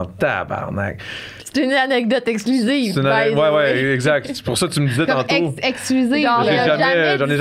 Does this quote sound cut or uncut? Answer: uncut